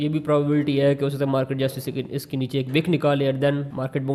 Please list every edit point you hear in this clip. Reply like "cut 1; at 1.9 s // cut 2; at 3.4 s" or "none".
none